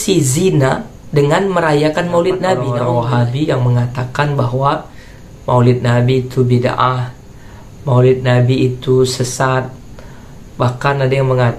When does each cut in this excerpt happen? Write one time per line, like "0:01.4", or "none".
0:02.7